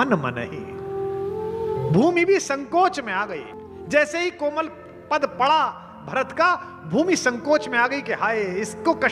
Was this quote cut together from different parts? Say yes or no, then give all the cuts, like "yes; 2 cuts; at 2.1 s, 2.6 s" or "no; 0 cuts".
no; 0 cuts